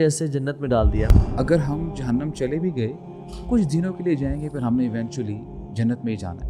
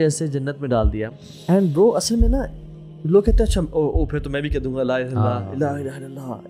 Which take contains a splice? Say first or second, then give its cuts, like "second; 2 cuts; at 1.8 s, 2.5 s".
first; 1 cut; at 1.2 s